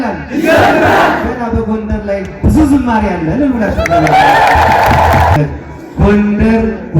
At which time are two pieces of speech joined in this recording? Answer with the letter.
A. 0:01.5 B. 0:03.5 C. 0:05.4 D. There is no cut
C